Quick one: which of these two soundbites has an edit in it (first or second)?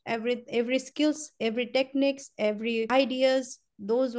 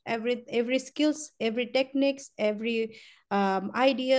first